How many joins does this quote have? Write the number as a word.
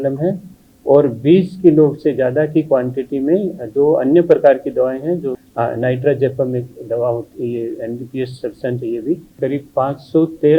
two